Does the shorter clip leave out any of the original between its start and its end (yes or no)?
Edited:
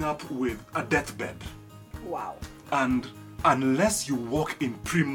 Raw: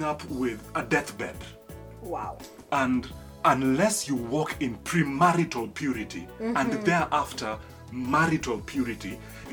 no